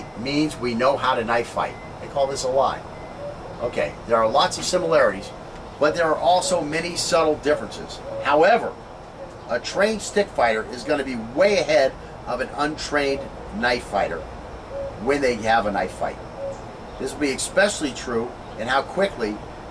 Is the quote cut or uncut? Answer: uncut